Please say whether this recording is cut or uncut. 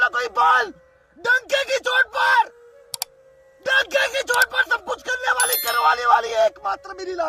uncut